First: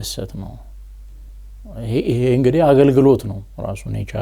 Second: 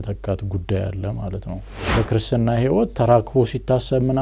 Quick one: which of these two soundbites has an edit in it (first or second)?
second